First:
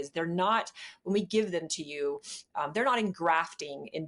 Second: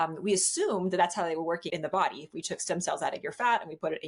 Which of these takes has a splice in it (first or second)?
second